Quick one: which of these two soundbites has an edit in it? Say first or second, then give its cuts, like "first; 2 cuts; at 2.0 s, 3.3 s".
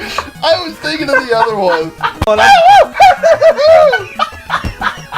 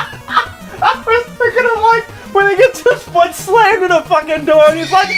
first; 1 cut; at 2.3 s